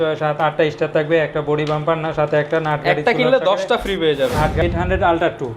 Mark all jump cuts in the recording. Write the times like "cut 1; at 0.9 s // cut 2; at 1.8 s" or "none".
cut 1; at 4.6 s

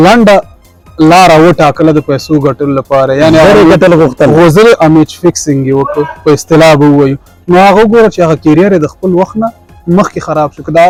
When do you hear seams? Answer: none

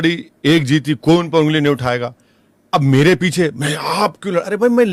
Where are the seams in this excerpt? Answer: none

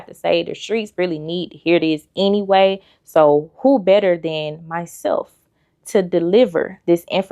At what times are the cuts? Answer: none

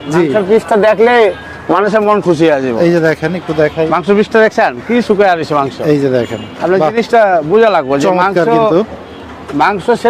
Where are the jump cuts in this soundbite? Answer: none

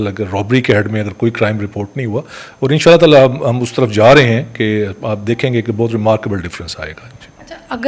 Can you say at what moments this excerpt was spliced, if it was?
none

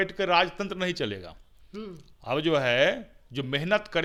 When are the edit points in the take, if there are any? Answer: none

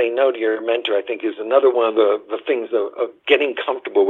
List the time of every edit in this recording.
none

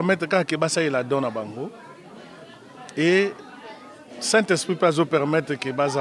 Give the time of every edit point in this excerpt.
none

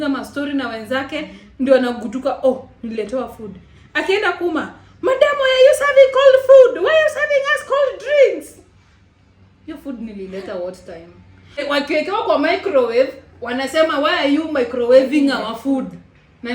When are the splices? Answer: cut 1; at 11.6 s

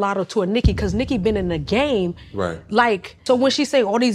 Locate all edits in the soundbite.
cut 1; at 3.2 s

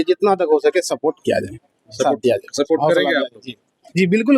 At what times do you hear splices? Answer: none

